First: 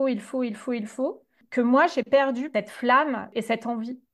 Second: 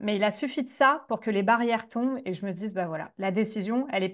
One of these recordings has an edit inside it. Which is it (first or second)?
first